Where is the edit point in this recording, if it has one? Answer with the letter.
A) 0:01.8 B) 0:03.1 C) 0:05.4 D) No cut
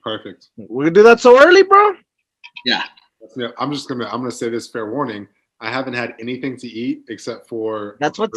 B